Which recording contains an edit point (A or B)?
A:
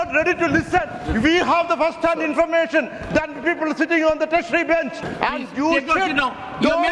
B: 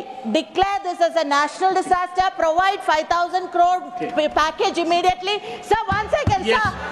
A